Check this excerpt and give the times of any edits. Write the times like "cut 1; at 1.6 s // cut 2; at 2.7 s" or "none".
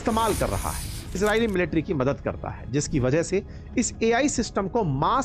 cut 1; at 1.2 s